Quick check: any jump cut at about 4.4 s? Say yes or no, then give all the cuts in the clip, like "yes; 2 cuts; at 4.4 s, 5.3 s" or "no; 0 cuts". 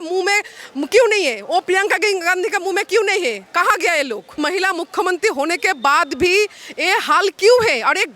yes; 1 cut; at 4.4 s